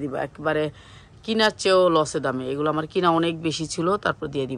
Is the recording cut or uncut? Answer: uncut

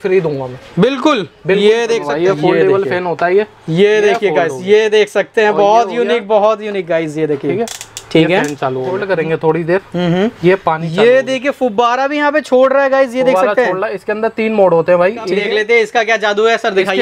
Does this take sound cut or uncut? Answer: cut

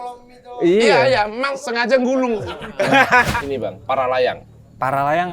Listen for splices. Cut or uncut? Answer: cut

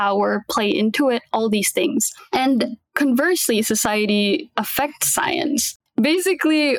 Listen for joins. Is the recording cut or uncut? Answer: cut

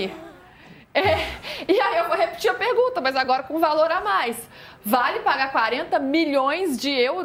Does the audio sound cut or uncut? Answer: uncut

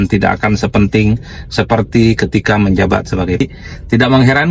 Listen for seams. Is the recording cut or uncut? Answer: cut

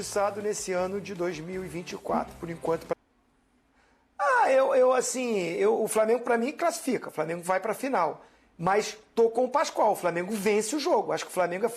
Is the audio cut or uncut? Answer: cut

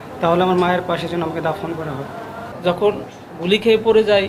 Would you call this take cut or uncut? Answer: cut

